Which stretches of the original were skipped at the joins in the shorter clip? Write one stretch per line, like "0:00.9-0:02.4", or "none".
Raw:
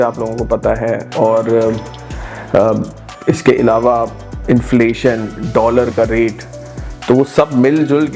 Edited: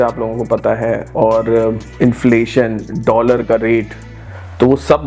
0:01.8-0:04.3